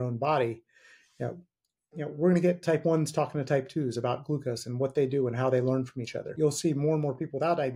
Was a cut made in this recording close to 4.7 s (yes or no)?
no